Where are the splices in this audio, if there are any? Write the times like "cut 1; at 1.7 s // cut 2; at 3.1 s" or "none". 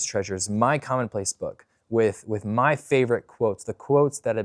none

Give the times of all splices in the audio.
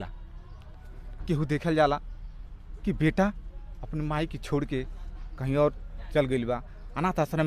none

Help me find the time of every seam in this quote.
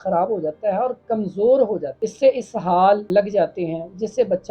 cut 1; at 1.9 s // cut 2; at 3.0 s

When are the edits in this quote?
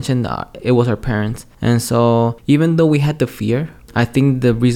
cut 1; at 1.4 s // cut 2; at 2.4 s // cut 3; at 3.8 s

